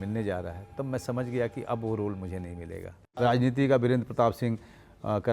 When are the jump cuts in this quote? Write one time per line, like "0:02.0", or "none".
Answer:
0:03.1